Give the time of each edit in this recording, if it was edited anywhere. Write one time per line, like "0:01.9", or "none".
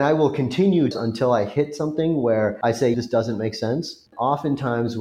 0:00.9
0:02.8
0:04.1